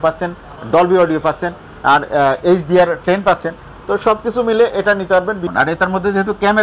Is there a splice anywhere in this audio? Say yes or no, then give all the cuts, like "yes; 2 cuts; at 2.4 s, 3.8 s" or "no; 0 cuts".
yes; 1 cut; at 5.4 s